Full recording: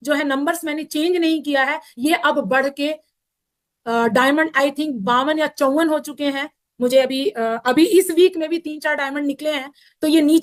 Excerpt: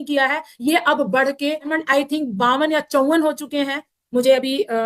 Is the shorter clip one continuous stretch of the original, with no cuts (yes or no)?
no